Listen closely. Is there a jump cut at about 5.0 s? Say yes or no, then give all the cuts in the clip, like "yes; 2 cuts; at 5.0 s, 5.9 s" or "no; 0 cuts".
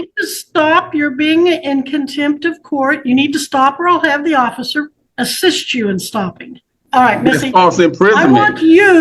yes; 2 cuts; at 5.0 s, 6.7 s